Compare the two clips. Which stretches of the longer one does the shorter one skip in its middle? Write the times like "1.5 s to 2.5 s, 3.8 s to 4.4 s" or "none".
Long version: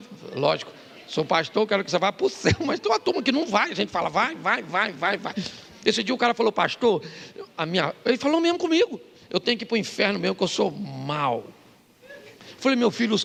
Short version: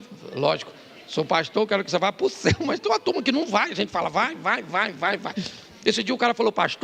none